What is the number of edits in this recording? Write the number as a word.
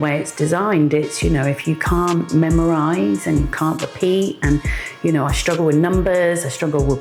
zero